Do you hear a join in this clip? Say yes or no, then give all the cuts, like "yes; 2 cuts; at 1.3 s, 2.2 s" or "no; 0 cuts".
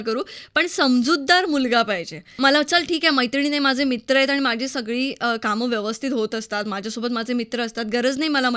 yes; 1 cut; at 2.2 s